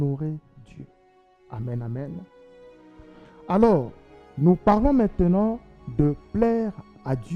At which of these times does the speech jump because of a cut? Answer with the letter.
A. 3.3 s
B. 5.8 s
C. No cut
C